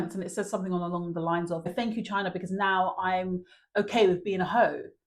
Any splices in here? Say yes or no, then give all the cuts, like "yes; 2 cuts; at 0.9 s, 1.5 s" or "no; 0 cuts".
yes; 1 cut; at 1.7 s